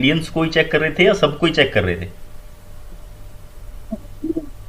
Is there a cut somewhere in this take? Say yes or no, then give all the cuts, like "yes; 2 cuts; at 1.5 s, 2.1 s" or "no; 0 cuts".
no; 0 cuts